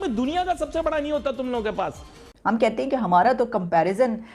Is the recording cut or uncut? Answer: cut